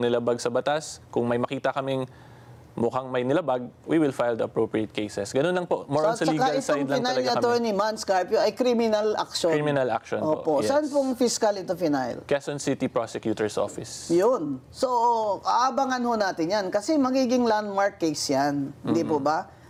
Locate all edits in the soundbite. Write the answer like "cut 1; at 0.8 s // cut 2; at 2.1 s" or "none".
none